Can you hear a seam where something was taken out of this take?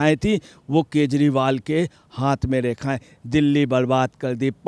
no; 0 cuts

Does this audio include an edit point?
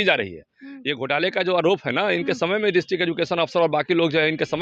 no; 0 cuts

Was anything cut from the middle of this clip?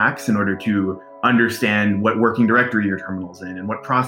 no; 0 cuts

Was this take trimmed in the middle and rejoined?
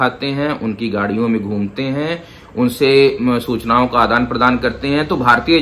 no; 0 cuts

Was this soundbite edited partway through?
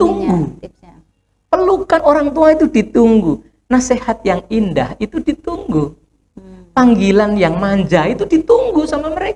no; 0 cuts

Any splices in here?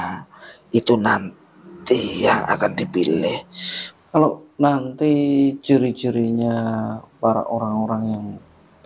yes; 1 cut; at 3.9 s

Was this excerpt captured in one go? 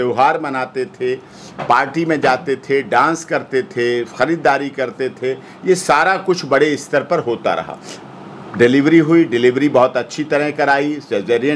yes; 0 cuts

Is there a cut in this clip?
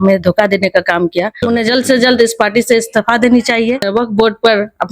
yes; 2 cuts; at 1.4 s, 3.9 s

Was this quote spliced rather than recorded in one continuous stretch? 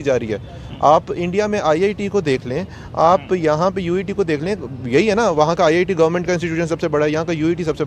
no; 0 cuts

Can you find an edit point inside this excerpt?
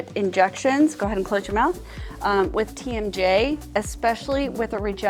no; 0 cuts

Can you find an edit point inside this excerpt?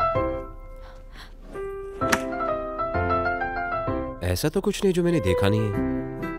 no; 0 cuts

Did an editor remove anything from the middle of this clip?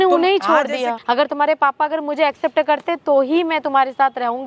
yes; 1 cut; at 1.0 s

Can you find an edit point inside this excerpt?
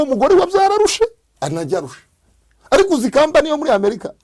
no; 0 cuts

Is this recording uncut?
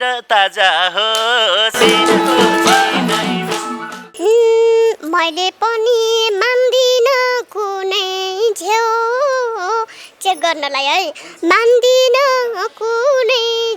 no; 1 cut; at 4.0 s

